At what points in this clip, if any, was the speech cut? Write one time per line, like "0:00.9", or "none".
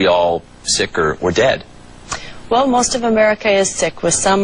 0:01.5